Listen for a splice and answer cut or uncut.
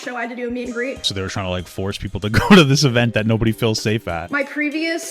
cut